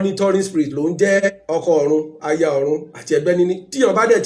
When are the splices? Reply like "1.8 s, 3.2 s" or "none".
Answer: 1.3 s